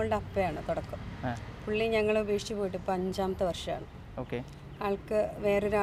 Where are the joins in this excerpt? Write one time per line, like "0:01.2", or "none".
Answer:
none